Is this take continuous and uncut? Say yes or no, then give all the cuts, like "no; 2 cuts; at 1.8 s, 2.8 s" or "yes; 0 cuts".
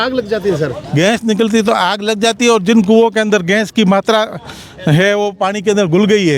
yes; 0 cuts